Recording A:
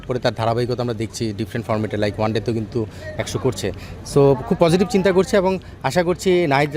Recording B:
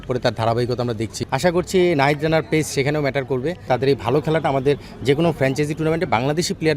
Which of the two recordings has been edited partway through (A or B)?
B